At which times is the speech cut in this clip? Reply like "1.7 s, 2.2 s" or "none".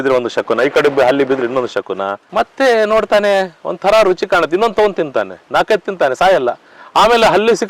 2.2 s